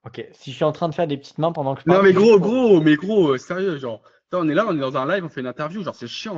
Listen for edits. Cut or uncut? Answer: uncut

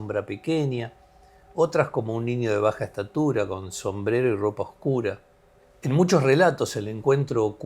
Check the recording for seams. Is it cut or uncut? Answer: cut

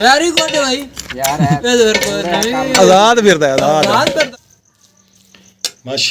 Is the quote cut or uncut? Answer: cut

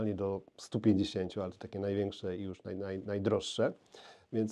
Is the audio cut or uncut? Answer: uncut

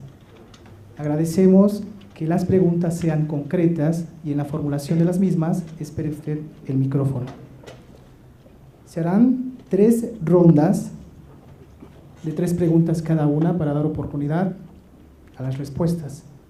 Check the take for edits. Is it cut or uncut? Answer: uncut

